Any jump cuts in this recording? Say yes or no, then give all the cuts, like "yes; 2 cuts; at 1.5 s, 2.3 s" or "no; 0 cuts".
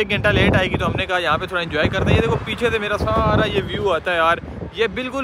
no; 0 cuts